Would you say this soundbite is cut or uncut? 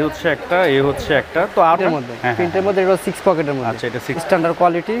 cut